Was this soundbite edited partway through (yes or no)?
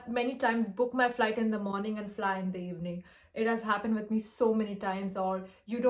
no